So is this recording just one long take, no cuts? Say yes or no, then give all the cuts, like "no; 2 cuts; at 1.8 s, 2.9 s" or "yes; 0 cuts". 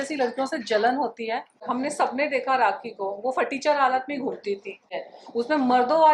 no; 2 cuts; at 1.5 s, 4.9 s